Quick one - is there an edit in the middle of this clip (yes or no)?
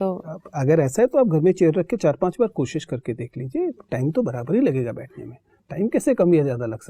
no